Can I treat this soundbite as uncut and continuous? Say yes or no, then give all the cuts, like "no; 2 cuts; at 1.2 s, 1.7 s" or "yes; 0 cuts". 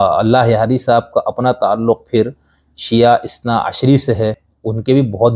no; 1 cut; at 4.4 s